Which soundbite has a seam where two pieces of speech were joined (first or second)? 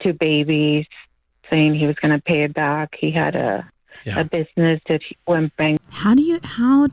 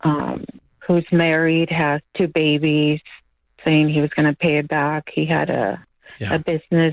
first